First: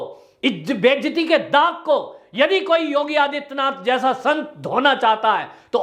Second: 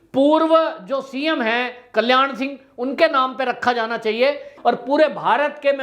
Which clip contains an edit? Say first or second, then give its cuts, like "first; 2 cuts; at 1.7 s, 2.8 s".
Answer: second; 1 cut; at 4.5 s